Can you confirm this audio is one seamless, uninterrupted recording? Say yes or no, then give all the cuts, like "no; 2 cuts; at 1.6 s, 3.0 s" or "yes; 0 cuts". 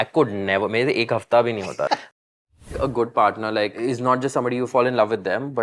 no; 3 cuts; at 2.0 s, 3.8 s, 4.7 s